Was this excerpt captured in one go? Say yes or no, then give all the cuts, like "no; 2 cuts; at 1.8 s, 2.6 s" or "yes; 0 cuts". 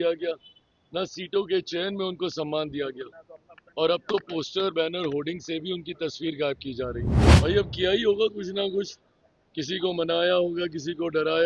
no; 1 cut; at 7.2 s